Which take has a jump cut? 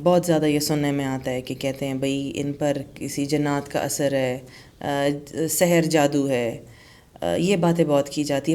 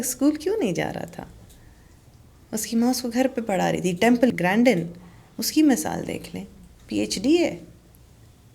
second; 1 cut; at 4.3 s

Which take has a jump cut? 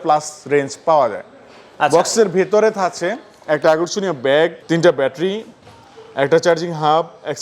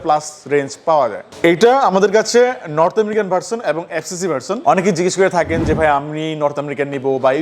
second; 2 cuts; at 1.2 s, 4.6 s

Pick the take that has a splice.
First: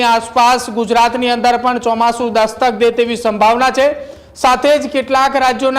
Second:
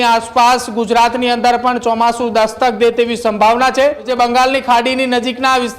second; 1 cut; at 4.1 s

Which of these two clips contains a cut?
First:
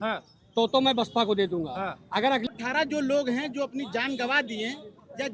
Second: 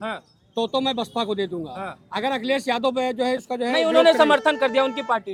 first; 1 cut; at 2.5 s

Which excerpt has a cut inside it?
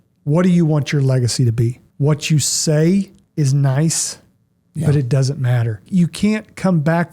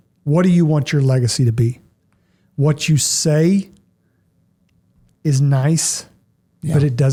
first; 3 cuts; at 1.8 s, 3.2 s, 5.8 s

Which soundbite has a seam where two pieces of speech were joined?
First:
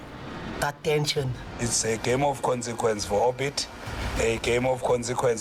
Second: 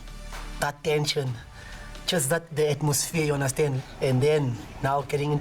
first; 1 cut; at 1.7 s

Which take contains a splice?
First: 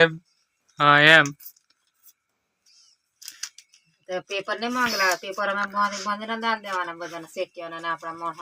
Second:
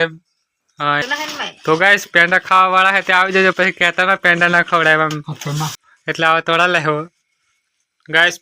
second; 2 cuts; at 1.0 s, 5.7 s

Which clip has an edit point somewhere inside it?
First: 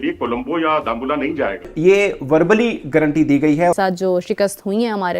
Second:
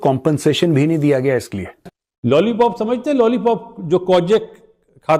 first; 2 cuts; at 1.7 s, 3.7 s

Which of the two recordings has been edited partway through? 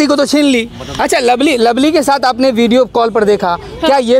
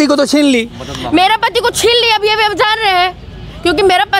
first; 1 cut; at 0.9 s

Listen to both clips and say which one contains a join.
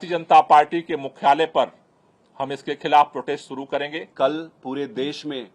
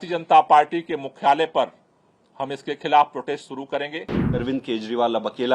second; 1 cut; at 4.4 s

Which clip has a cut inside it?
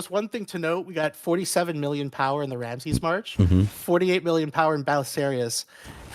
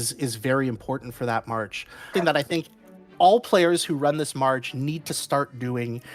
second; 1 cut; at 2.1 s

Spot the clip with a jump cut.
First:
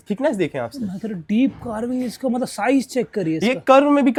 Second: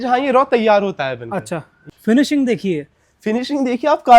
second; 1 cut; at 1.8 s

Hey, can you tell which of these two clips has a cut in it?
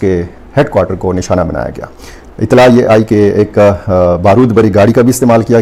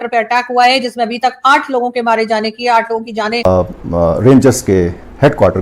second; 1 cut; at 3.4 s

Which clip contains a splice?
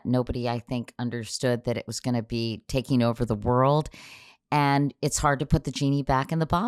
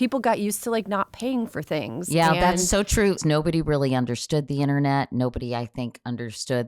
second; 1 cut; at 3.2 s

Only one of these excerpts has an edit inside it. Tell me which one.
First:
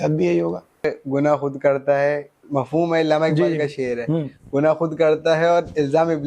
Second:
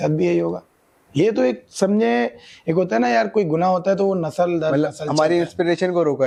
first; 1 cut; at 0.9 s

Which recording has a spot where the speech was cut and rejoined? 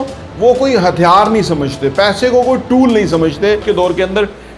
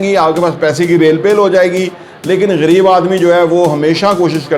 first; 1 cut; at 3.6 s

